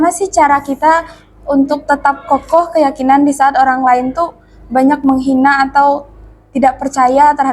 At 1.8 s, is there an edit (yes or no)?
no